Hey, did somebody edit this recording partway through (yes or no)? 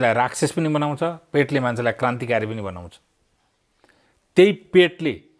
no